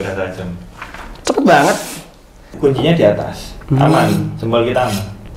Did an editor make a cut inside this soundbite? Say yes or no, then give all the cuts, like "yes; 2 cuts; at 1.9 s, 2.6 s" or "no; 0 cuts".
yes; 1 cut; at 2.5 s